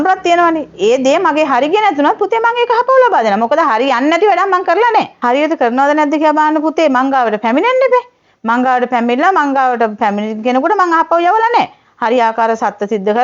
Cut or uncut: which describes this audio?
cut